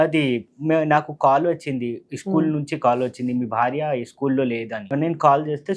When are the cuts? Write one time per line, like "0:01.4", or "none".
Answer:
0:04.9

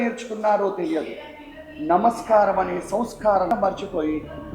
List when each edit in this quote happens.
0:03.5

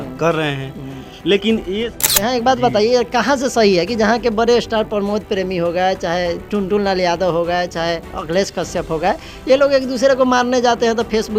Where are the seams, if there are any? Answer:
0:01.9

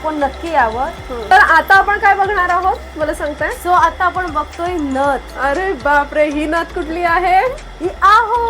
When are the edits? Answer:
0:01.1

